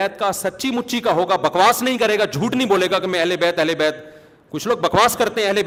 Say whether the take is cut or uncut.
uncut